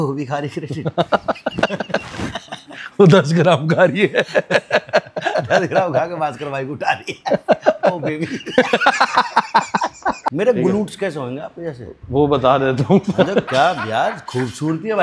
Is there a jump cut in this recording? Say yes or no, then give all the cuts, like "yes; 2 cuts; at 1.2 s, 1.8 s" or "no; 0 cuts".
yes; 1 cut; at 10.3 s